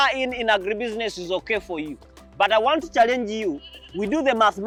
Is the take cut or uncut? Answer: uncut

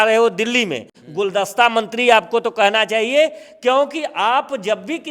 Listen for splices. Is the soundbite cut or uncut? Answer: uncut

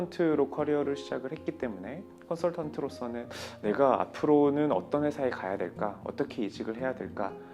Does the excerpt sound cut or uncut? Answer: uncut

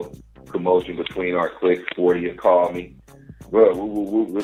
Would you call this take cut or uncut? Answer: uncut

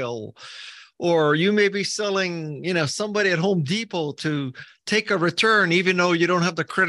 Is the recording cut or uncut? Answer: uncut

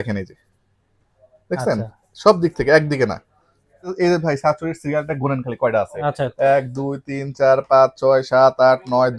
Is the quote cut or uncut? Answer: cut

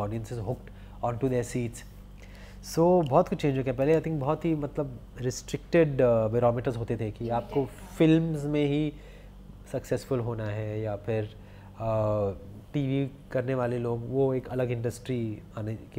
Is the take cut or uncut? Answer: uncut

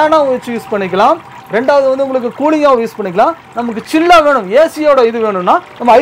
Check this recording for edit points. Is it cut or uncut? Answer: uncut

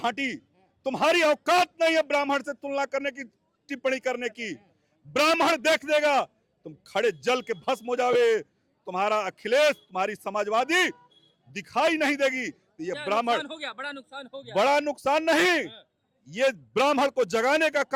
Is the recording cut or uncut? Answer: uncut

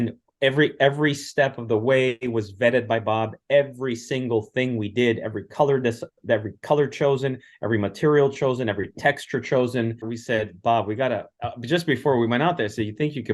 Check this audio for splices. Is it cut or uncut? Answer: cut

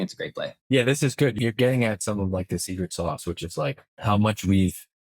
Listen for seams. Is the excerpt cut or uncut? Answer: cut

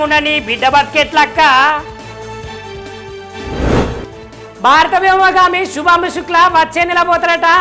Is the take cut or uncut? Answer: cut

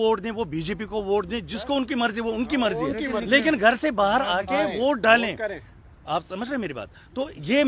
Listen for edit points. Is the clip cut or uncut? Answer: uncut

